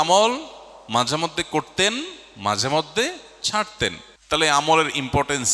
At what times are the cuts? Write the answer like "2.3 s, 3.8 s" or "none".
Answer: 4.1 s